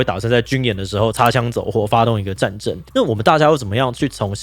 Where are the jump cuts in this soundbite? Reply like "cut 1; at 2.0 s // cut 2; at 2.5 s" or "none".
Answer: cut 1; at 2.8 s